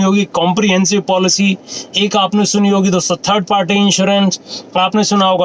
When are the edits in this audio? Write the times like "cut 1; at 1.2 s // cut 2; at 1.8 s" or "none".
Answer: none